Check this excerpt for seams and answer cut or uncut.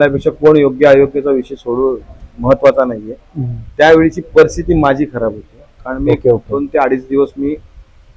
uncut